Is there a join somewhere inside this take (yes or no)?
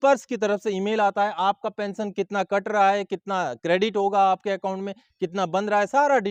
no